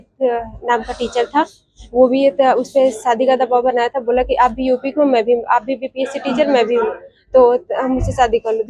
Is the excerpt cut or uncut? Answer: uncut